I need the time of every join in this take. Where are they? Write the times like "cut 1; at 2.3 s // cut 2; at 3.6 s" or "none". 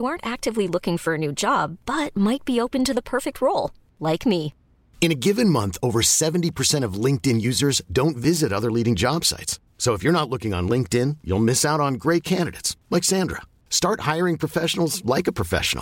none

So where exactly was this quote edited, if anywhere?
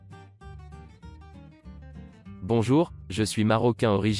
cut 1; at 2.4 s

